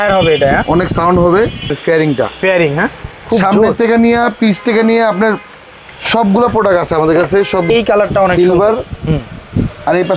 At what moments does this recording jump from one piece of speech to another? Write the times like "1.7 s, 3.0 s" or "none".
1.8 s, 7.7 s